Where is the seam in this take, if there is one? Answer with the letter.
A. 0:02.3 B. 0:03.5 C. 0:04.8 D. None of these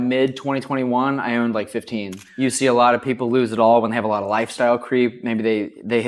A